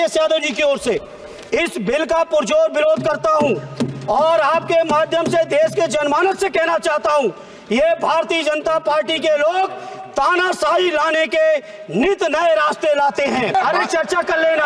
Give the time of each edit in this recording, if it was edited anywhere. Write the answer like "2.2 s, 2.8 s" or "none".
13.5 s